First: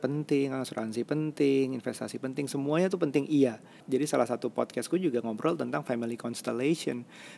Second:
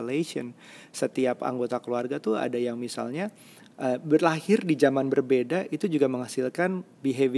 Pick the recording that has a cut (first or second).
first